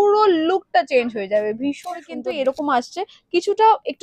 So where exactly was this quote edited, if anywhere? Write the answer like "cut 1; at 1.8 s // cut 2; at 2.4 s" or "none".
cut 1; at 2.2 s